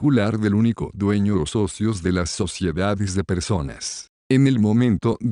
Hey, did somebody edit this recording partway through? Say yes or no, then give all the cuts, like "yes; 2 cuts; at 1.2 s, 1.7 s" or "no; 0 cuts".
no; 0 cuts